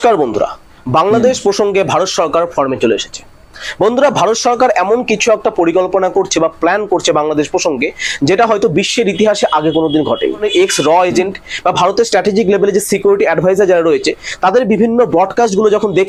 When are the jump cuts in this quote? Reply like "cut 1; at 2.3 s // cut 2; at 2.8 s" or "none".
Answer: none